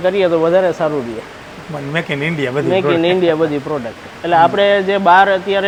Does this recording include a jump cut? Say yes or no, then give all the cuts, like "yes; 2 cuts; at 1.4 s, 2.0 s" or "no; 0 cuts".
no; 0 cuts